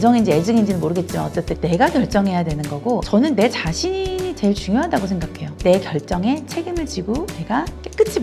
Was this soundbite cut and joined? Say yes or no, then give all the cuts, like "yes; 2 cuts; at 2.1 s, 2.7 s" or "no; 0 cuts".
yes; 2 cuts; at 1.6 s, 3.1 s